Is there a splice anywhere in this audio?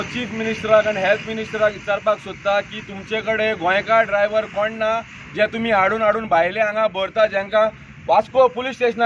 no; 0 cuts

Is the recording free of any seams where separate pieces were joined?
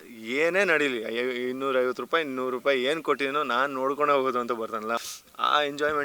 no; 1 cut; at 5.0 s

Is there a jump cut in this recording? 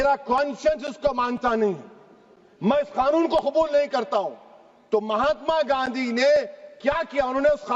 no; 0 cuts

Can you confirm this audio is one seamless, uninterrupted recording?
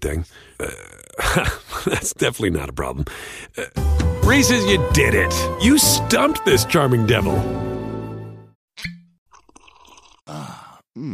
no; 1 cut; at 8.5 s

